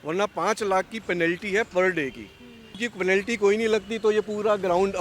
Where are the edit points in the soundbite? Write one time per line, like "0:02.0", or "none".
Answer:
0:02.9